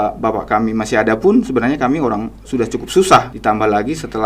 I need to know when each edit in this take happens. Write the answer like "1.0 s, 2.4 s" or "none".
3.3 s